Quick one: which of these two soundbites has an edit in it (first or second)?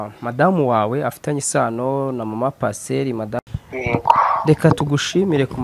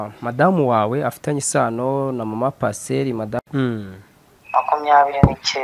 first